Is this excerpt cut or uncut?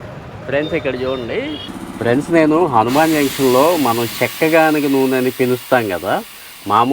cut